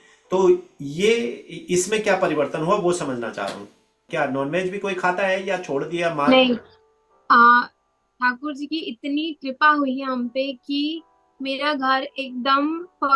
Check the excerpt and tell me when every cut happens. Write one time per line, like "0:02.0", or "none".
0:04.1